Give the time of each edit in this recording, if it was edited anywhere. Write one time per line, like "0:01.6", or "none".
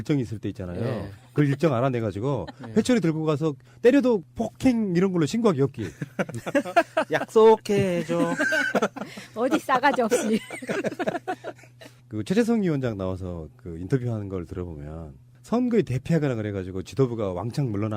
0:12.9